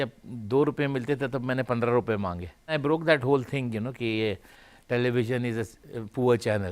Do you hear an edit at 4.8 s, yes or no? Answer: no